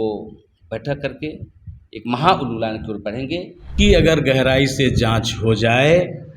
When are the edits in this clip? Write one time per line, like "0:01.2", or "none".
0:03.7